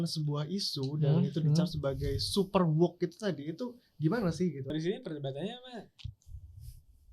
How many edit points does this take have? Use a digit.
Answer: 1